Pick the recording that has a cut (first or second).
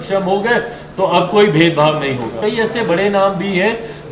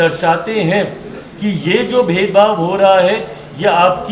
first